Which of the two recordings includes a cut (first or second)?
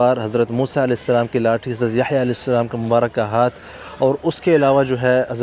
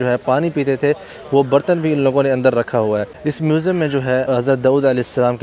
second